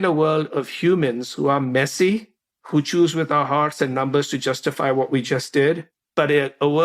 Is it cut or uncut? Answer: cut